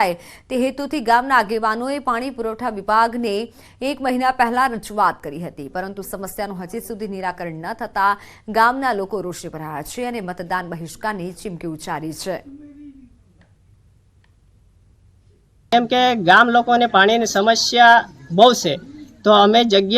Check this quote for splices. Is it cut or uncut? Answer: cut